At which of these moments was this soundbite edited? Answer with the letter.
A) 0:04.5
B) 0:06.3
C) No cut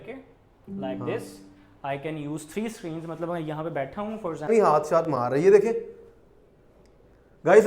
A